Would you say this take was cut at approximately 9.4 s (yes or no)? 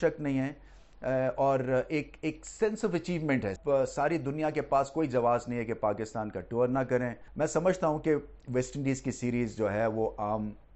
no